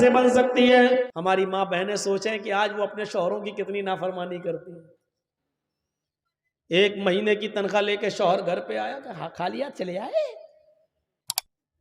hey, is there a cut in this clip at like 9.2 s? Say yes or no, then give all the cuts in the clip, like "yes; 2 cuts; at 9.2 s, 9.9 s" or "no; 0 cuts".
no; 1 cut; at 1.1 s